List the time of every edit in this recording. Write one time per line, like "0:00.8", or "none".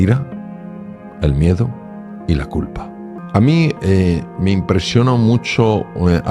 0:03.2

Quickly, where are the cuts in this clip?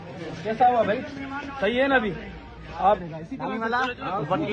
0:03.1

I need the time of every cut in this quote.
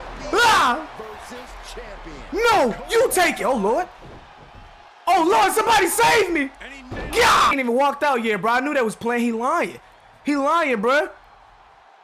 0:07.5

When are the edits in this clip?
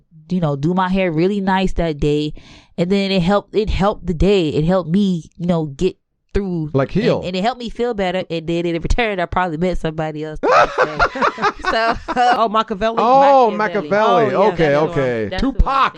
0:12.4

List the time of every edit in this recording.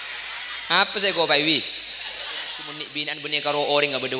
0:02.9

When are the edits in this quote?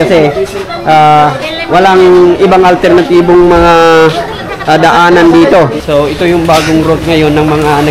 0:05.7

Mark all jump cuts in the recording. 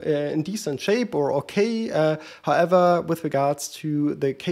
none

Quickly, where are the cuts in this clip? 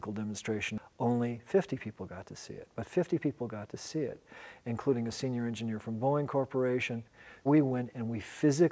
0:04.6

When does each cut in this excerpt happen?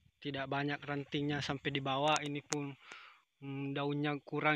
none

